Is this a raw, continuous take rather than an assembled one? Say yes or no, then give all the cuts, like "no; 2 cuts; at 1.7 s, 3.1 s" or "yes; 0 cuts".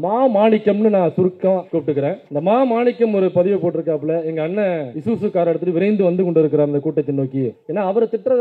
no; 2 cuts; at 2.0 s, 4.9 s